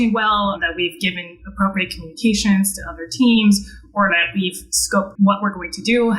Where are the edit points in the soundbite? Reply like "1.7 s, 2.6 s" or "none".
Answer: 5.1 s